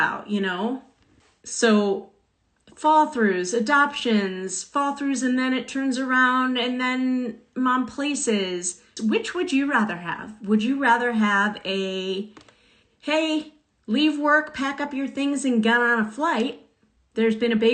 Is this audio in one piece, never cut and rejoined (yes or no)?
no